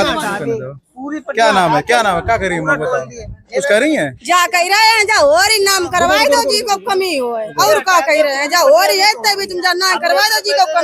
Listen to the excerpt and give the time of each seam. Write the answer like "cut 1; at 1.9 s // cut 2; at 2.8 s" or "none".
none